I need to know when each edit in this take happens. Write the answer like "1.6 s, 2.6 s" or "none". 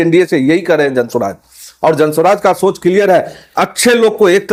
none